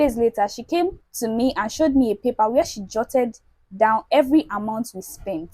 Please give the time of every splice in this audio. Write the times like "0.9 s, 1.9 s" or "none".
1.1 s